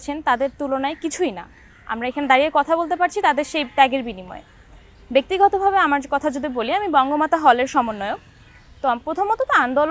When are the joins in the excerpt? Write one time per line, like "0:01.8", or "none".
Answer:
none